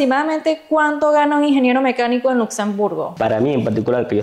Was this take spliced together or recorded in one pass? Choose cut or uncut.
cut